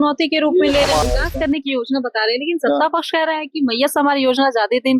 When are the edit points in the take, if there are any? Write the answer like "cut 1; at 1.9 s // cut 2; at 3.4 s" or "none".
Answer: cut 1; at 1.0 s